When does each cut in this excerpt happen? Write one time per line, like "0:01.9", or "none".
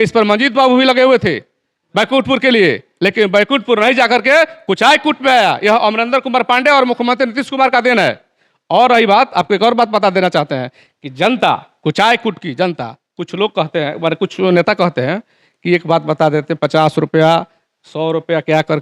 none